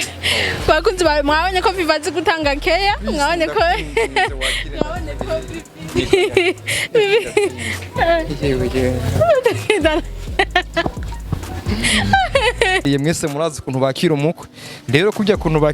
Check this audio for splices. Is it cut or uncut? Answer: cut